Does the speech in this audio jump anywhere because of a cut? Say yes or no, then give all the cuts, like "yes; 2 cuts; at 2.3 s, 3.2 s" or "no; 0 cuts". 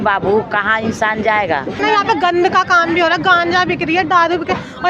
yes; 1 cut; at 1.7 s